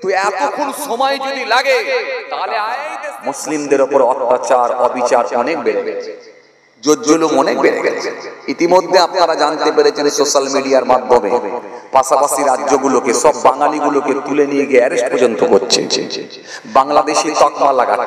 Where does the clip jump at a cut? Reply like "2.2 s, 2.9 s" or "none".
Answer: 2.9 s